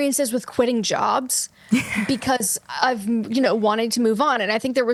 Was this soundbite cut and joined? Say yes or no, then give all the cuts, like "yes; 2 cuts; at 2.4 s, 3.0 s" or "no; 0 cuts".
no; 0 cuts